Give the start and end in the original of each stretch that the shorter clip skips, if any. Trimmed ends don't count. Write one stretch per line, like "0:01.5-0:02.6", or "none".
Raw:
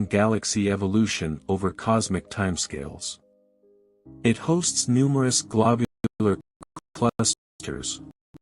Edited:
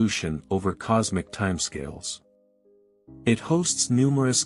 none